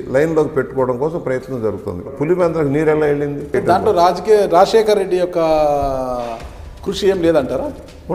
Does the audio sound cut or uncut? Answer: cut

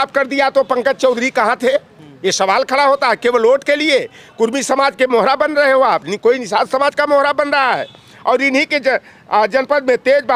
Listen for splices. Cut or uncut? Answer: uncut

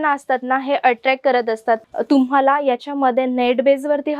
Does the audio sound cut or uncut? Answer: cut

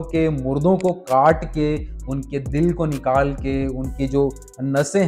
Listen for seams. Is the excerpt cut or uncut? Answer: uncut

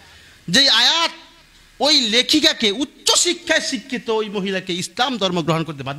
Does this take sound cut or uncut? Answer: uncut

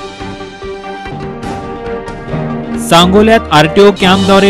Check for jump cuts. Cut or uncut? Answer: cut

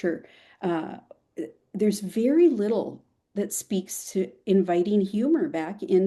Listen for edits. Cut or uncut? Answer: uncut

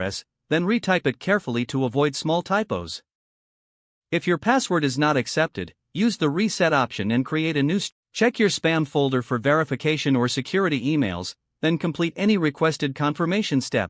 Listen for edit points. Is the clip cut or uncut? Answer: cut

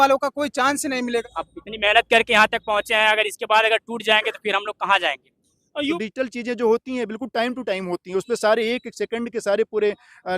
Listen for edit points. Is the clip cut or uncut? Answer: cut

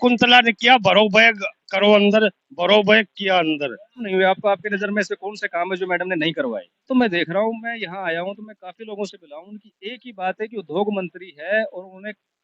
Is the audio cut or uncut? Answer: cut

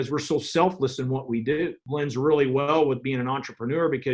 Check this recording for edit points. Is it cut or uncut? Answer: cut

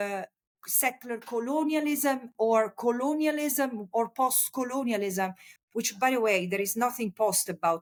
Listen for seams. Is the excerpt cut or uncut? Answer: uncut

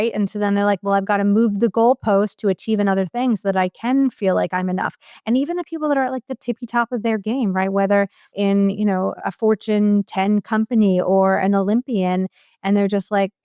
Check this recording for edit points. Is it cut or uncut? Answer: uncut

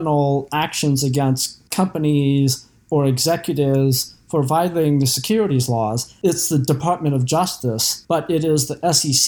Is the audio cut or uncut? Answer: cut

